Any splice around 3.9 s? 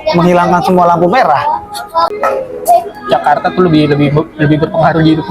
no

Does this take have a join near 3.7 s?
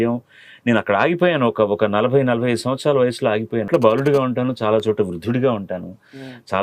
yes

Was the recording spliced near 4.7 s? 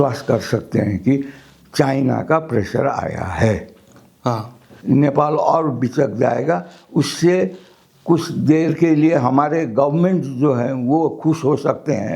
yes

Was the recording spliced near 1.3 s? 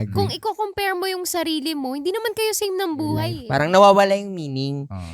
no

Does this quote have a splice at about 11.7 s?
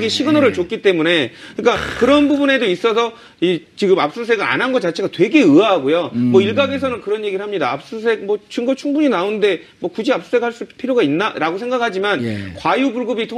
yes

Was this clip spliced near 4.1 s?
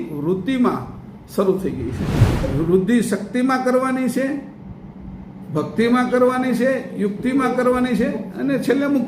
no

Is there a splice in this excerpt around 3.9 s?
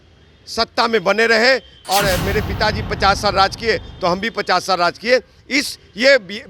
no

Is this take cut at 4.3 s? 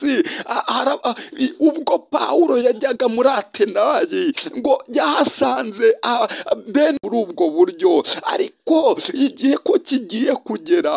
no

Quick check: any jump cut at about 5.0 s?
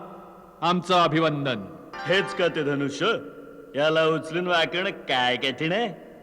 no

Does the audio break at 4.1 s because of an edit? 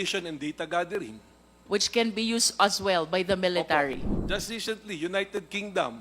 yes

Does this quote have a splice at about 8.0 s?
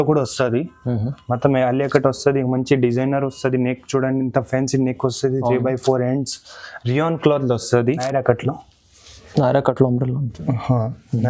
yes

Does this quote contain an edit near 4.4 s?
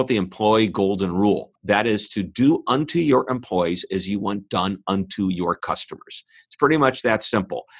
no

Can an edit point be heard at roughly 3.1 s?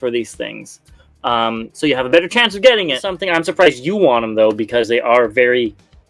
yes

